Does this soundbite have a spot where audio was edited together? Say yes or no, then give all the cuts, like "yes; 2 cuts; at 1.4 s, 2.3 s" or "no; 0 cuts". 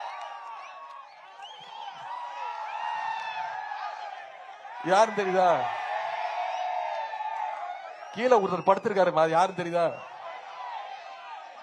no; 0 cuts